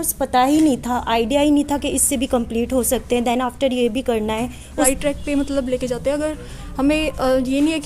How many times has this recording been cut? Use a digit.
1